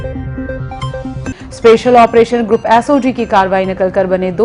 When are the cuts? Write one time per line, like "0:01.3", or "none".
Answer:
0:01.3